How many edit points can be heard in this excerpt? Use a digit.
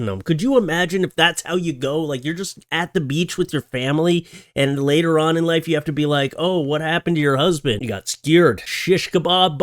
2